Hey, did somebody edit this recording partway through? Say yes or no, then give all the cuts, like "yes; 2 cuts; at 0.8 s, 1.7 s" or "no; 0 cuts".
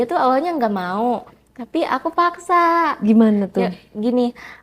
no; 0 cuts